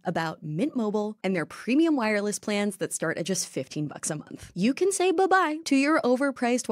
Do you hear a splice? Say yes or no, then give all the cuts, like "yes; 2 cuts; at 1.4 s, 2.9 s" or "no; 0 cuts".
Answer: yes; 1 cut; at 4.5 s